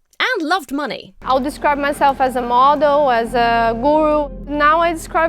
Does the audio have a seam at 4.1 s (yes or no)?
no